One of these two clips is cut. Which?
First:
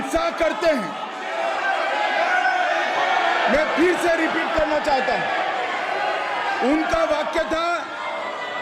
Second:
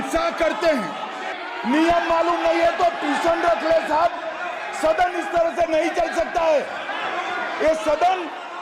second; 1 cut; at 1.3 s

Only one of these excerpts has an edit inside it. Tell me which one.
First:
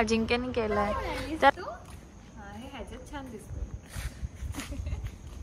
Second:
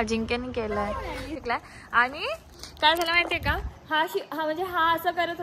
second; 1 cut; at 1.3 s

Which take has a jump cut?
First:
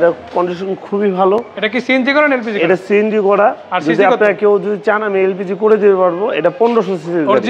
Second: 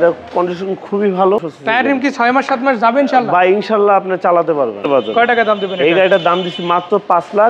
second; 2 cuts; at 1.5 s, 4.9 s

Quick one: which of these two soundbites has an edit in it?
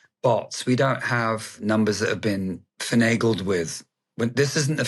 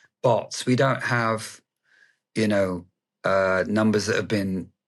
first; 2 cuts; at 1.6 s, 2.7 s

